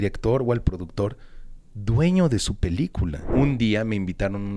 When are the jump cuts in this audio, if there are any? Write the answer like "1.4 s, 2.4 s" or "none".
3.2 s